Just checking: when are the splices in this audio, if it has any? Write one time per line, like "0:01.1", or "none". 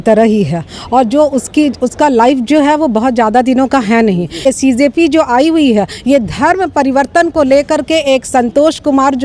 0:04.4